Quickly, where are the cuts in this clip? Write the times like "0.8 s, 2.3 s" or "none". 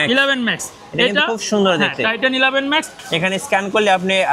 2.9 s